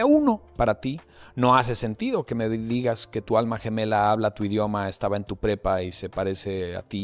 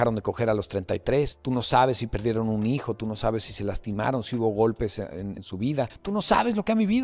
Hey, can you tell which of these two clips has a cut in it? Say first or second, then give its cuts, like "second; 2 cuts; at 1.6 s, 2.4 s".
second; 2 cuts; at 1.4 s, 6.0 s